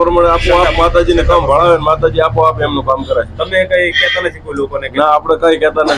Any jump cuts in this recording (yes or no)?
no